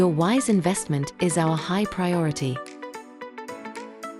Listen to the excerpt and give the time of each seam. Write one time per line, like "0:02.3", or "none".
0:02.6